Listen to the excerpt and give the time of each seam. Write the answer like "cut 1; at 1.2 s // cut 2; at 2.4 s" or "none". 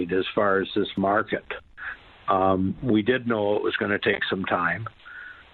none